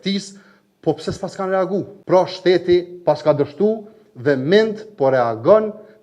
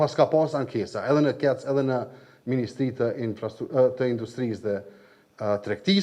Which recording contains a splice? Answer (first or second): first